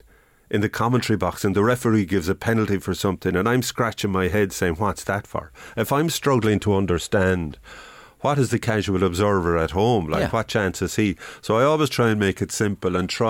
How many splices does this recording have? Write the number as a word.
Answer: zero